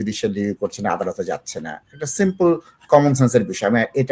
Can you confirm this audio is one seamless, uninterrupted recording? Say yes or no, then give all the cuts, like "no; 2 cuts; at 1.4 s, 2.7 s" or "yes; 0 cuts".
yes; 0 cuts